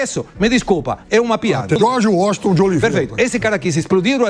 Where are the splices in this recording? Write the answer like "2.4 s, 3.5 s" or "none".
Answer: 1.8 s